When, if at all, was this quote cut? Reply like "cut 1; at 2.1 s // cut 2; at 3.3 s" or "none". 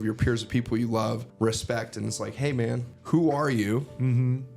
cut 1; at 1.3 s // cut 2; at 2.9 s

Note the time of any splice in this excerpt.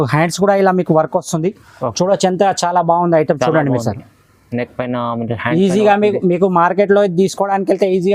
none

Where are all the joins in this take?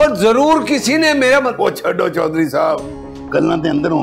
none

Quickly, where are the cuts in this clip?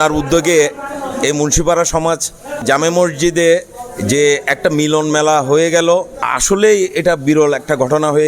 cut 1; at 6.2 s

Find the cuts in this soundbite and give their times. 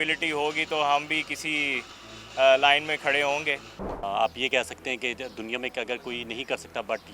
cut 1; at 4.0 s

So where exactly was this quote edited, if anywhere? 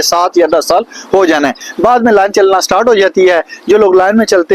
cut 1; at 1.5 s

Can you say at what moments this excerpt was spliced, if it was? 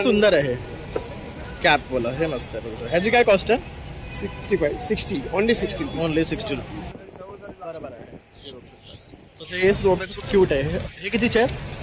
cut 1; at 6.9 s

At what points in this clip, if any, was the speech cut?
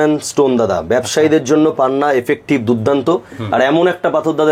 none

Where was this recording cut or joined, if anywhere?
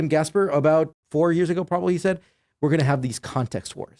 cut 1; at 0.9 s

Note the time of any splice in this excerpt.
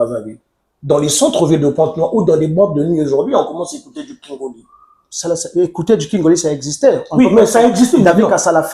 none

